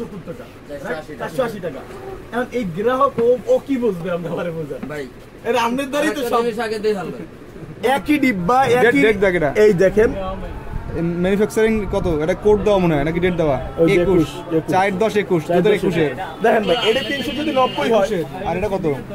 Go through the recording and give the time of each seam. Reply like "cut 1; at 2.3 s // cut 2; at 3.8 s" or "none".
cut 1; at 7.7 s

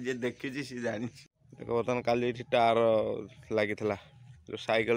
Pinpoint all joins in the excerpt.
cut 1; at 1.2 s

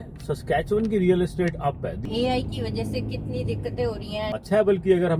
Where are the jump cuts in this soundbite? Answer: cut 1; at 2.0 s // cut 2; at 4.4 s

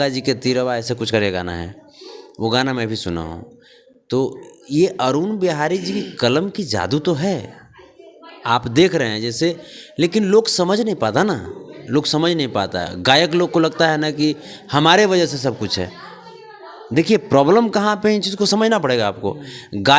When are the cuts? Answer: none

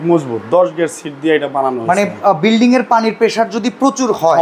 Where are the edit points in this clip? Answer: none

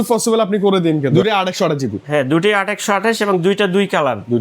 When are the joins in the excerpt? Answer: cut 1; at 1.1 s

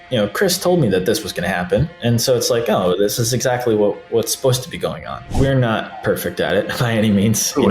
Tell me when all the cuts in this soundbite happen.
cut 1; at 5.3 s

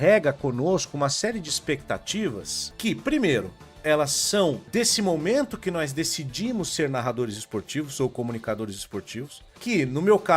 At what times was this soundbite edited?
cut 1; at 2.6 s // cut 2; at 4.6 s // cut 3; at 9.4 s

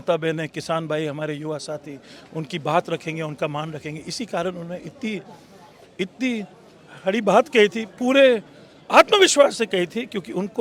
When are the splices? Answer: none

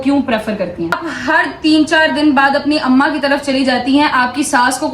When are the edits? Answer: cut 1; at 1.1 s

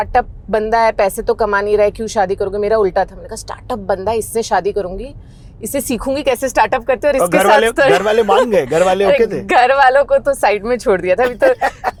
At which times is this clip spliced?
none

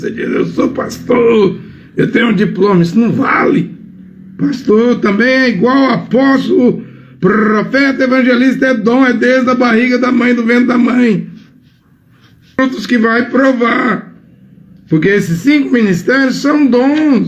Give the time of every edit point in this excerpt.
cut 1; at 12.6 s

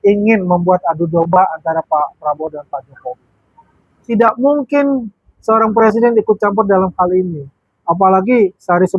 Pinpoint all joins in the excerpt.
cut 1; at 4.1 s

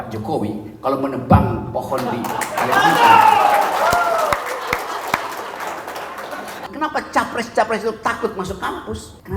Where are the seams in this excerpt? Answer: cut 1; at 6.7 s

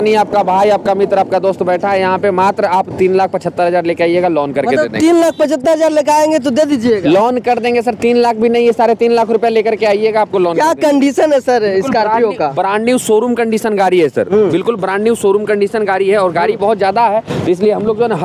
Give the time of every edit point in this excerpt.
none

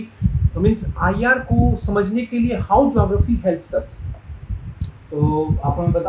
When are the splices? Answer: cut 1; at 4.3 s

